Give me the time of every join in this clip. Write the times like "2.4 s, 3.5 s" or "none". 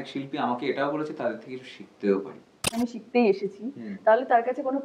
2.7 s